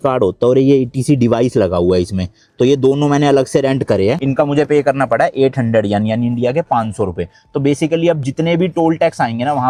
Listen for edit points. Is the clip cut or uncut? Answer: uncut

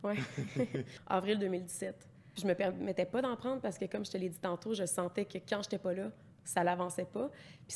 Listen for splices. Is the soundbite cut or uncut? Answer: cut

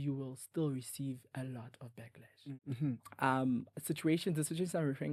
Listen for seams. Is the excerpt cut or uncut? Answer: cut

